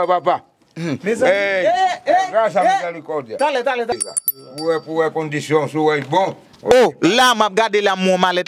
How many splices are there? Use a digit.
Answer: 1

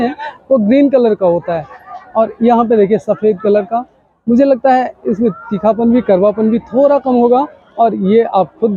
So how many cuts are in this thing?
0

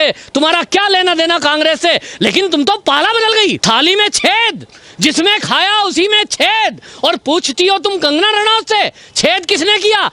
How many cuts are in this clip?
1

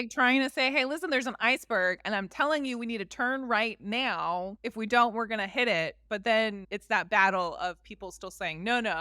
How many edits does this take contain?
2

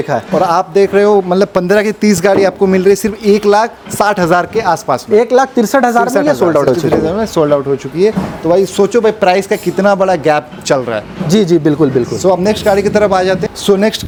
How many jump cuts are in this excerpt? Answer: 0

